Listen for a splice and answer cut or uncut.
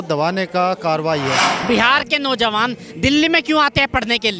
cut